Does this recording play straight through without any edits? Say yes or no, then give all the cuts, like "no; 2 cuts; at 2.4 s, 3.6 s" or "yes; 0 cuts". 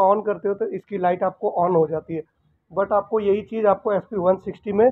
yes; 0 cuts